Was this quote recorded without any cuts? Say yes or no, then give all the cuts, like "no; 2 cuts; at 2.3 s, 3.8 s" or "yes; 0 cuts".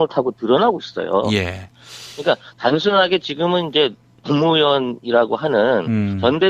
no; 1 cut; at 4.3 s